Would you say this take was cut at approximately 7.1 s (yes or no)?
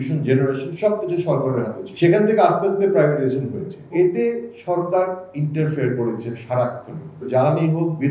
yes